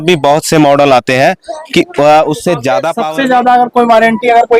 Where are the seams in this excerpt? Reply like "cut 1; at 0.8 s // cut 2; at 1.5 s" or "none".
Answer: cut 1; at 2.9 s

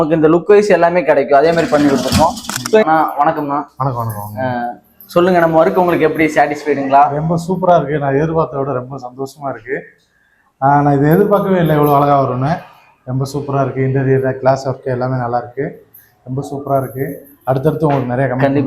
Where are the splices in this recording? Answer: cut 1; at 2.8 s

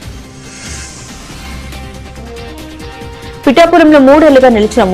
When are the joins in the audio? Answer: cut 1; at 3.0 s

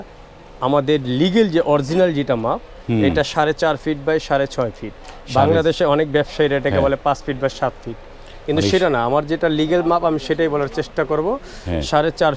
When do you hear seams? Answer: none

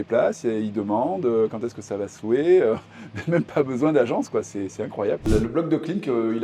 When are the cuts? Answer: cut 1; at 5.3 s

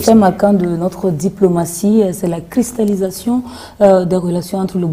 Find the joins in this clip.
none

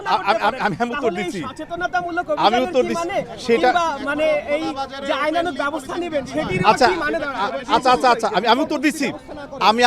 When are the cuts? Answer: none

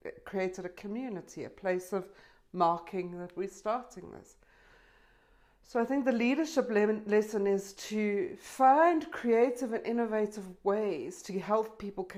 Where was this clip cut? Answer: none

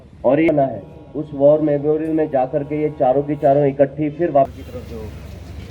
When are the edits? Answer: cut 1; at 4.5 s

